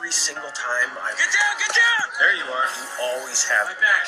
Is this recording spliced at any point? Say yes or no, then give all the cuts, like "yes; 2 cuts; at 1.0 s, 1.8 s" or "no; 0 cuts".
yes; 1 cut; at 1.7 s